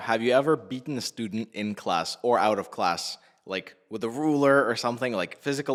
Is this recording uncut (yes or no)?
yes